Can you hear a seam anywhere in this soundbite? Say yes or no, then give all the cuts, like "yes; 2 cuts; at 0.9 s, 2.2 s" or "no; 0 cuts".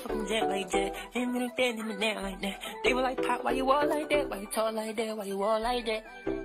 no; 0 cuts